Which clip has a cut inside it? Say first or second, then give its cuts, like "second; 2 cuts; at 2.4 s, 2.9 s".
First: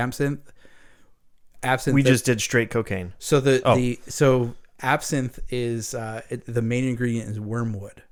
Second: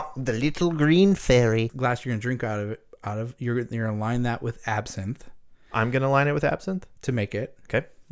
second; 1 cut; at 1.7 s